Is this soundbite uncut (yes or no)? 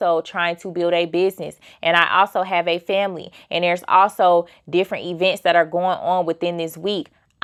yes